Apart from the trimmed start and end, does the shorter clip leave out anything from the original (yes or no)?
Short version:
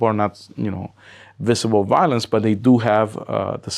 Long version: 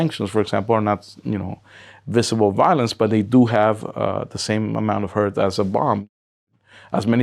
no